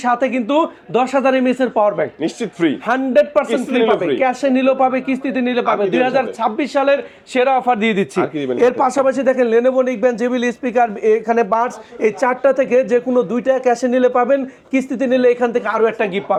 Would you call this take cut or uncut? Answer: uncut